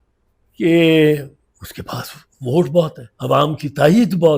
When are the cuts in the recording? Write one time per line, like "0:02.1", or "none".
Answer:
0:03.1